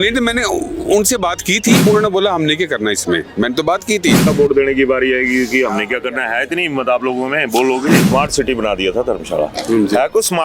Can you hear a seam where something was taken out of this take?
yes; 3 cuts; at 1.8 s, 4.3 s, 8.0 s

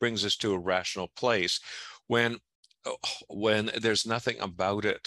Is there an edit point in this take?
no; 0 cuts

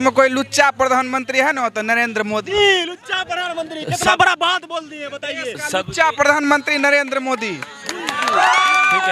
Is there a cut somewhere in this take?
no; 0 cuts

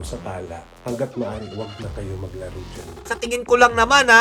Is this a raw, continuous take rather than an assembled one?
no; 1 cut; at 3.1 s

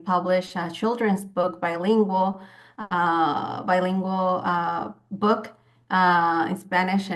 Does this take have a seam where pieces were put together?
no; 0 cuts

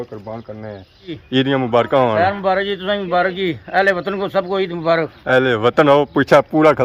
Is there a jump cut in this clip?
yes; 1 cut; at 1.1 s

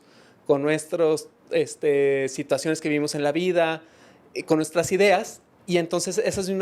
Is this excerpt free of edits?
yes; 0 cuts

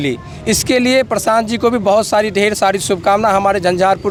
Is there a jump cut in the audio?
no; 0 cuts

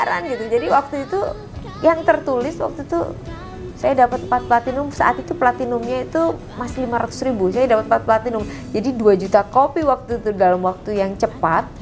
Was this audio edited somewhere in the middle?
no; 0 cuts

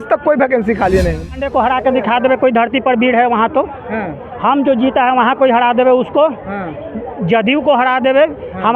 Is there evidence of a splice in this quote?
yes; 1 cut; at 1.3 s

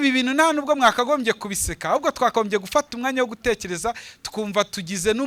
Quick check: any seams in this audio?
no; 0 cuts

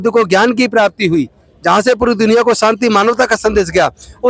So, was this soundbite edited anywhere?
no; 0 cuts

